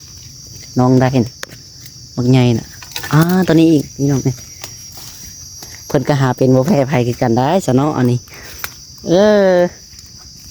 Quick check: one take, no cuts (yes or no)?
yes